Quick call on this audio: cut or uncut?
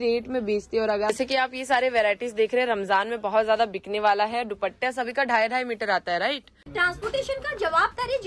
cut